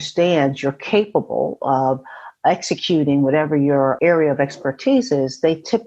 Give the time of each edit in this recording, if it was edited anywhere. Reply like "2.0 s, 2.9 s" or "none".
4.0 s